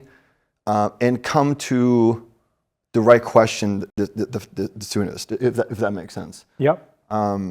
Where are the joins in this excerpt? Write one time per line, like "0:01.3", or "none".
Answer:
none